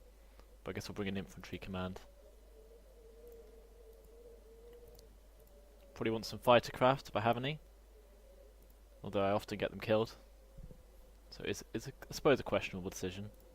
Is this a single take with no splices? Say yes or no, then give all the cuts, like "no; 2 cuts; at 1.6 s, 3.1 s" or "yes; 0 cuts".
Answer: no; 1 cut; at 8.9 s